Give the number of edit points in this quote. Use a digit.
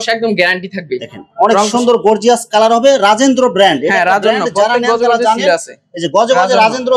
0